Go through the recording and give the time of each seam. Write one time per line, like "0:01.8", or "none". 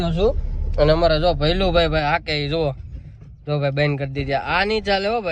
none